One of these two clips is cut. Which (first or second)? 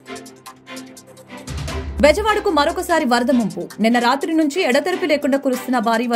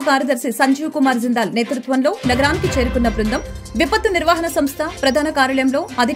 first